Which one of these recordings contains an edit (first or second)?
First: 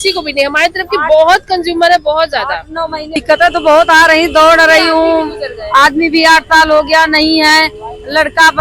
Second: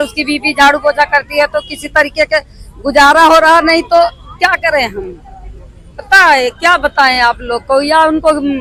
first